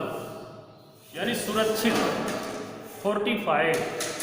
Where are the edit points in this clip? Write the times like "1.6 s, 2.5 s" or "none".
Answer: 1.1 s